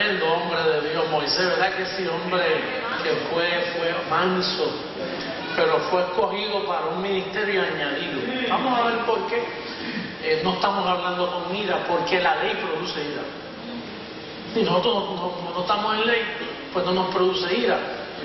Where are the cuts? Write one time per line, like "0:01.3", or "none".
0:11.3